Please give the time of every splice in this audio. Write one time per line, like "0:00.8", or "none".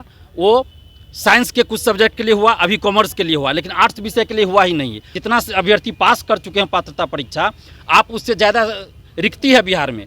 0:05.1